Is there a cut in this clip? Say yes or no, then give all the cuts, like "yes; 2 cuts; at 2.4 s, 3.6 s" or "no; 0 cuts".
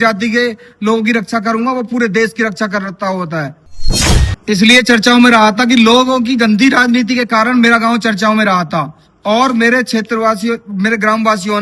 yes; 1 cut; at 4.0 s